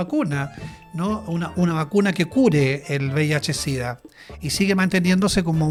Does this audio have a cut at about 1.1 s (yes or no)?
no